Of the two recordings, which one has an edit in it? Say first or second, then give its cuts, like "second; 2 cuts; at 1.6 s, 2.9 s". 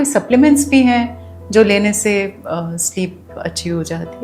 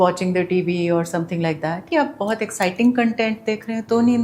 second; 1 cut; at 1.8 s